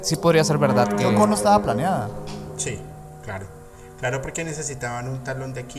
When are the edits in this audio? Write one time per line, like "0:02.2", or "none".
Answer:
none